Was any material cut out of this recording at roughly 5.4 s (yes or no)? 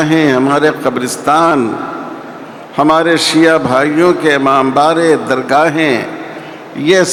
no